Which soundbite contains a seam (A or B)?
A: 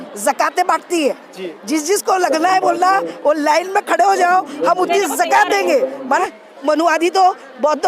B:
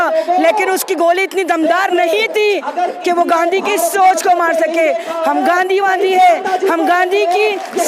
A